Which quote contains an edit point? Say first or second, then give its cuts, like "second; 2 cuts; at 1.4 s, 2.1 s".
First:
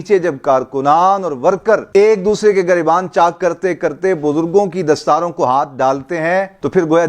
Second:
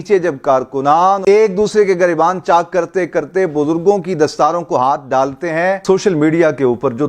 second; 2 cuts; at 1.2 s, 5.8 s